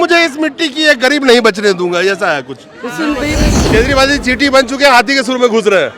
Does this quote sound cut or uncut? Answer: cut